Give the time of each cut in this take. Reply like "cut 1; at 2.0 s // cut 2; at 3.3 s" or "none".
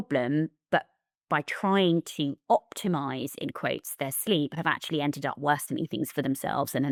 none